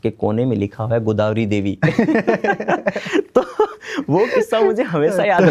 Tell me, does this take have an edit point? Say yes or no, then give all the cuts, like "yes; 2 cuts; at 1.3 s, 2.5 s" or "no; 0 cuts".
no; 0 cuts